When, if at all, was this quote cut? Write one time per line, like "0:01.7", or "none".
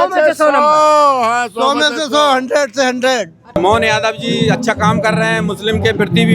0:03.6

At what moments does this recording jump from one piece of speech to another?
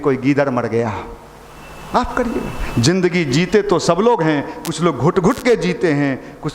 none

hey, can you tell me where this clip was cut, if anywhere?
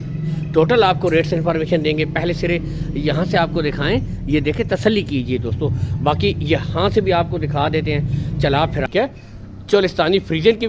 0:08.9

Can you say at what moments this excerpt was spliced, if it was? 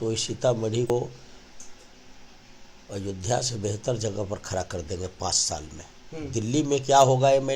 0:00.9

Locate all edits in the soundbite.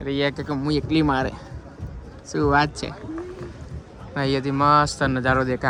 none

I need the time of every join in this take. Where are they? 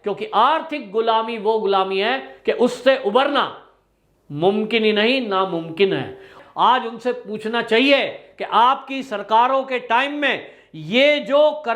0:06.3

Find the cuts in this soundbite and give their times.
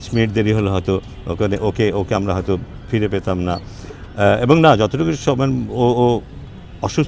none

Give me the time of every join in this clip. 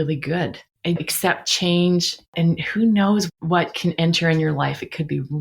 0:02.3

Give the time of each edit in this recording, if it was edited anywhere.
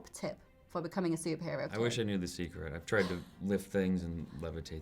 0:01.7

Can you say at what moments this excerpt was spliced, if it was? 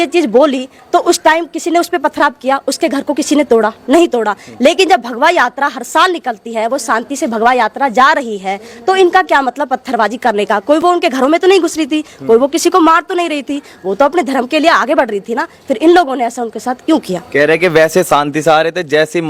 none

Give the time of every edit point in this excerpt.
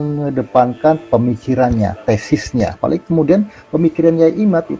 0:02.8

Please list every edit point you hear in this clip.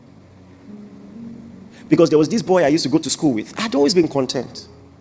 none

